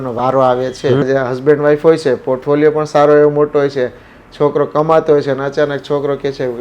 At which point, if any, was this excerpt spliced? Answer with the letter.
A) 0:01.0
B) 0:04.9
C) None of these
A